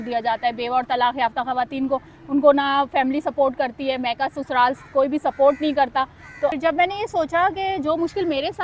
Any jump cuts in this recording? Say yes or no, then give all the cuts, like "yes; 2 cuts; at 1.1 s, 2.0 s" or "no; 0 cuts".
yes; 1 cut; at 6.5 s